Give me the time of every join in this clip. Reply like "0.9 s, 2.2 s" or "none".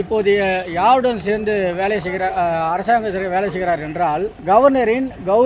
4.3 s